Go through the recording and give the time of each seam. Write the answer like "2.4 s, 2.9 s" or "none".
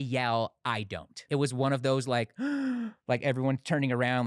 1.3 s